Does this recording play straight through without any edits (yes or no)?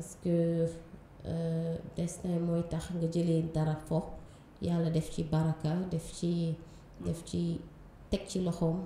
yes